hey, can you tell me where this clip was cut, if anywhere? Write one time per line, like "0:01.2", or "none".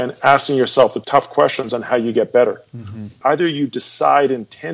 none